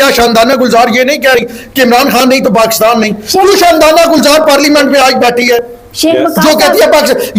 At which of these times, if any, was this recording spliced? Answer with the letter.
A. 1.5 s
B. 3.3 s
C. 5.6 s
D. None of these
D